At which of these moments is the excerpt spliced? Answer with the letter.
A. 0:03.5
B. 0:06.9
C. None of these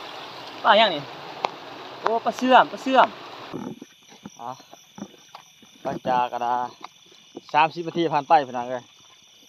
A